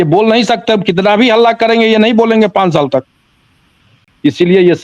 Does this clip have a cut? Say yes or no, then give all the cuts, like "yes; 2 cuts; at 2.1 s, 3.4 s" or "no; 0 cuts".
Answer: yes; 1 cut; at 3.9 s